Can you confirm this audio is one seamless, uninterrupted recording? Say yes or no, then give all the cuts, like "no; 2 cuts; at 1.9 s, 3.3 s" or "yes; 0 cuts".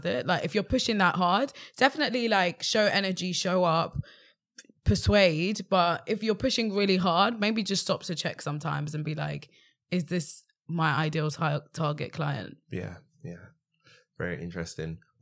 yes; 0 cuts